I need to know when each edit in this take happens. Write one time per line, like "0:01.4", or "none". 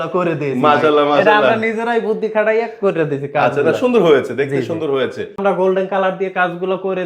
0:05.4